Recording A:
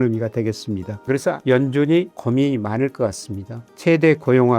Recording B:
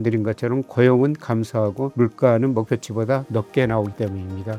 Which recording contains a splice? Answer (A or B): A